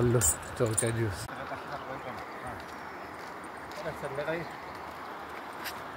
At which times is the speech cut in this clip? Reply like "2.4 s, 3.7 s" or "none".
1.3 s